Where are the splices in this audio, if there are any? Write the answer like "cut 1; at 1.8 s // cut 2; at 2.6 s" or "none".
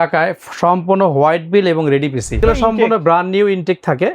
cut 1; at 2.4 s